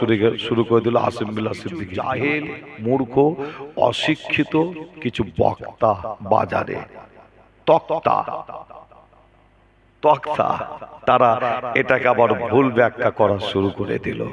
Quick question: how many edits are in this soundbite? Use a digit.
1